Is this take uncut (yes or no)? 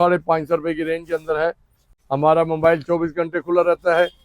no